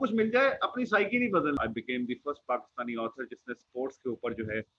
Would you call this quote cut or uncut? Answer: cut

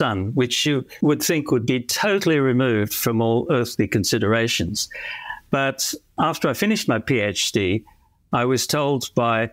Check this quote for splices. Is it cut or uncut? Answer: uncut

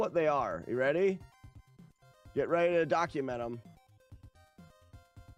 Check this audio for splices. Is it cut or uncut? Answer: uncut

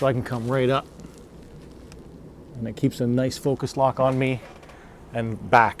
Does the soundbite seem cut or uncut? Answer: uncut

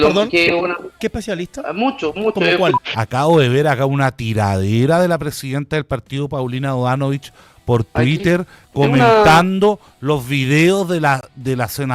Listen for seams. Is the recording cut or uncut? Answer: cut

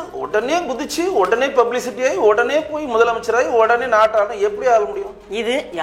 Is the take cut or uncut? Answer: uncut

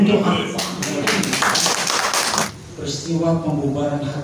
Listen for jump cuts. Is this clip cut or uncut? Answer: cut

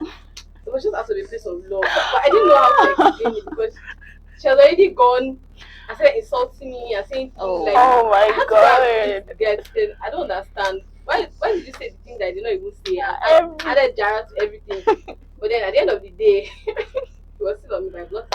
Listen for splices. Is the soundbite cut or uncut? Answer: uncut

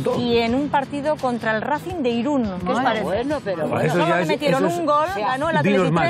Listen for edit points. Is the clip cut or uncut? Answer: uncut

